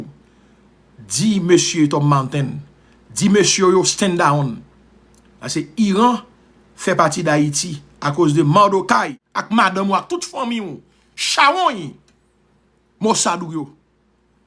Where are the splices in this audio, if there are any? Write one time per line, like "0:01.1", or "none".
0:09.2

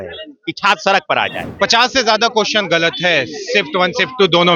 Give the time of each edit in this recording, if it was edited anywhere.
0:01.4

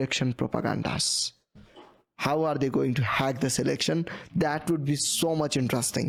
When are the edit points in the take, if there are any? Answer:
none

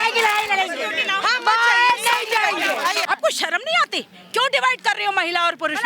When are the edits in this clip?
0:03.0

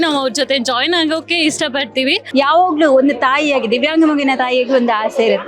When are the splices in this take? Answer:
0:02.2

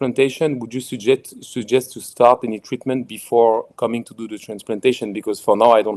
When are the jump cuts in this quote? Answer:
none

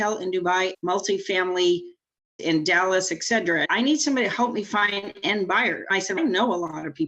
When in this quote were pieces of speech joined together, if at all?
0:00.7
0:02.4
0:03.6
0:06.0

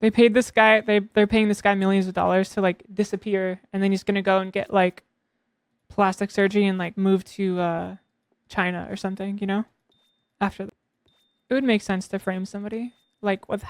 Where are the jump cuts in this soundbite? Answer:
0:10.7

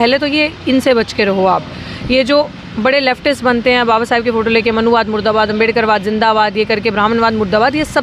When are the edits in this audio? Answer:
none

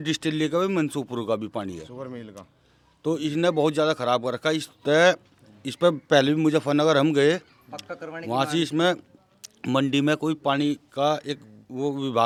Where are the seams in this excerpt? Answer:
none

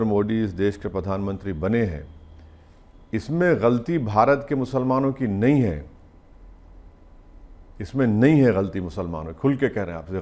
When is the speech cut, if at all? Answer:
none

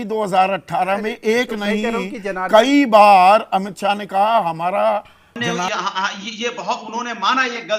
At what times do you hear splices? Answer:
0:05.5

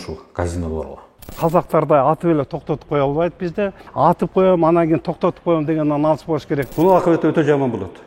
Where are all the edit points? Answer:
0:01.4
0:03.8
0:06.7

